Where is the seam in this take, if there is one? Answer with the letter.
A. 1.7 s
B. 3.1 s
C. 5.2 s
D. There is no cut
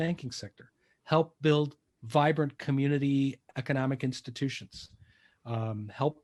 D